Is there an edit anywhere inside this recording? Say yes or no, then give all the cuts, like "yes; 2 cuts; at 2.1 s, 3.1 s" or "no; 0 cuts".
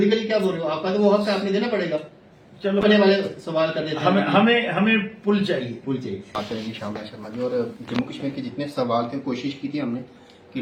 no; 0 cuts